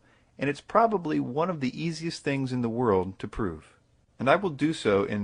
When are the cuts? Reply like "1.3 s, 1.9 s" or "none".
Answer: 1.9 s

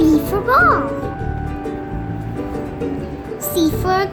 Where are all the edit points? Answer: none

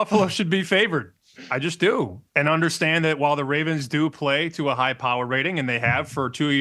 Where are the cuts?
2.2 s

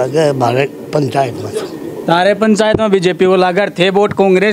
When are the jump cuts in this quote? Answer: none

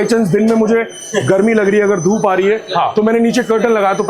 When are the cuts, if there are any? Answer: none

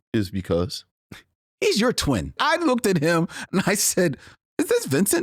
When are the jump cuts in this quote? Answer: 2.4 s

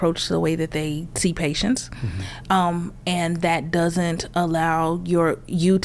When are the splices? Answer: none

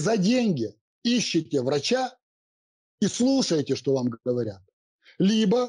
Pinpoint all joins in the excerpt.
none

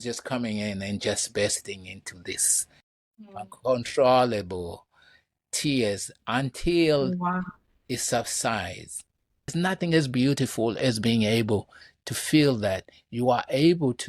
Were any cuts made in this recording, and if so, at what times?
9.5 s

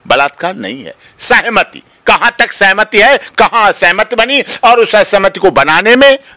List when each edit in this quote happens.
none

